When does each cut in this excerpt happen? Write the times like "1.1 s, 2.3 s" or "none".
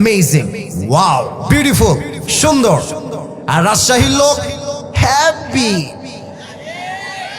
none